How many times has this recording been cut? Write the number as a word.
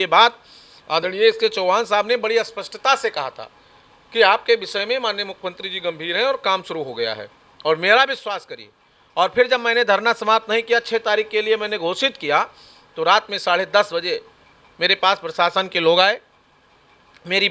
zero